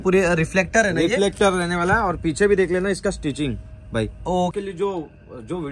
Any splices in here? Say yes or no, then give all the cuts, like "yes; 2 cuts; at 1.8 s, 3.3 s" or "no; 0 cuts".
yes; 1 cut; at 4.5 s